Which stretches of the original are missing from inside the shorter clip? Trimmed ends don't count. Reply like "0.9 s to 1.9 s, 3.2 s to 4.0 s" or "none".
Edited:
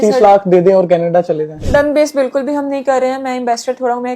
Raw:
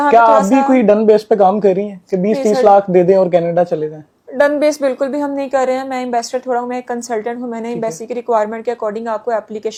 4.0 s to 4.2 s